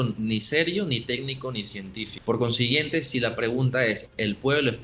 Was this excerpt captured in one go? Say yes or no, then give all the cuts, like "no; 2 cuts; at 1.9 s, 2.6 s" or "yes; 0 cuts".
no; 1 cut; at 2.1 s